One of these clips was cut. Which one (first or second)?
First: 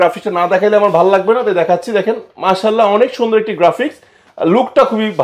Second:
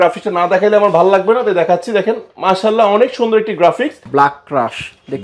second